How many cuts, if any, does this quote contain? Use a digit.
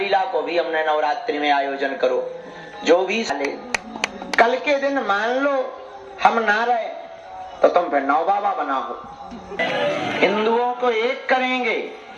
2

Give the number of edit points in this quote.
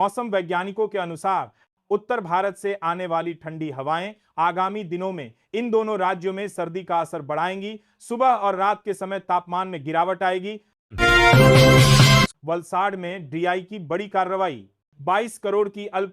2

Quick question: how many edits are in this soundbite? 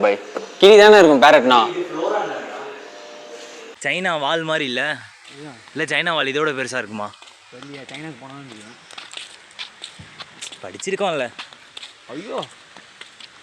1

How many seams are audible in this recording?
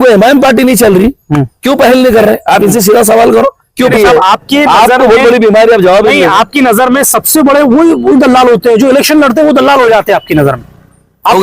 1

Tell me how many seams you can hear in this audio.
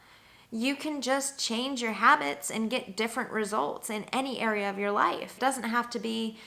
1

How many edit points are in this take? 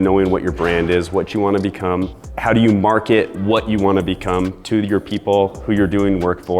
1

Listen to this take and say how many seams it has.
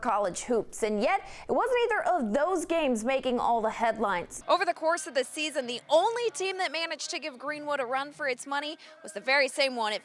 1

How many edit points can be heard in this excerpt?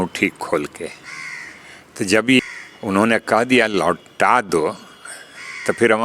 1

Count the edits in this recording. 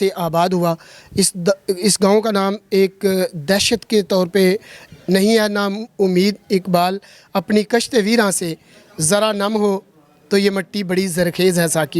1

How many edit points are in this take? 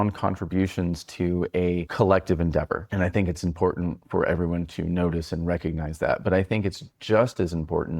2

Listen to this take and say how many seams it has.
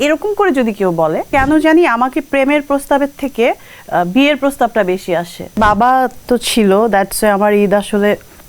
2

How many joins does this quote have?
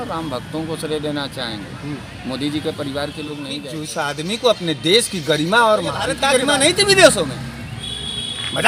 2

